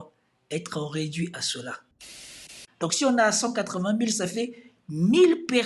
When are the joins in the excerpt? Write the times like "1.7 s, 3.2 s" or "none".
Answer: 2.4 s